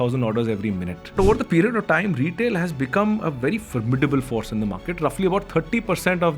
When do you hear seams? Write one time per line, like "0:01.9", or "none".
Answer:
0:01.2